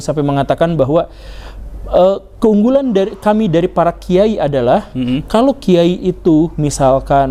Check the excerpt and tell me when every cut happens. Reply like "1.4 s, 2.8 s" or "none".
none

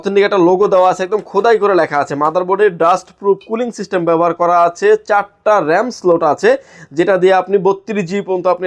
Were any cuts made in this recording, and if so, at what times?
none

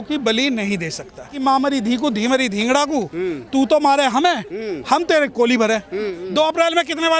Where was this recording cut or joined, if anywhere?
1.3 s, 6.1 s

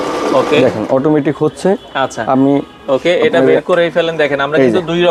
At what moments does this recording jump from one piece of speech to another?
none

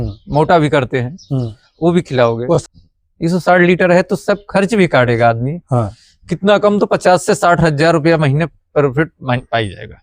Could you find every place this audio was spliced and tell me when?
2.7 s

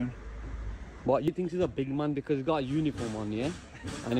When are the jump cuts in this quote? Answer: 1.3 s

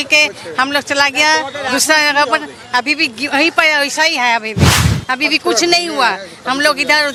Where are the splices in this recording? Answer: none

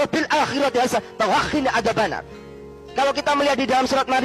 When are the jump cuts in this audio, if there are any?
none

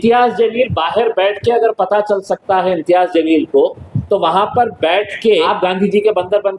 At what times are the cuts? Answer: 5.5 s

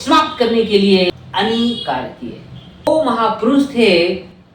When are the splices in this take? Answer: 1.1 s, 2.9 s

